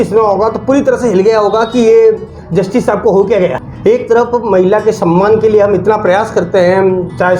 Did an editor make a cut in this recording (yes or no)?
yes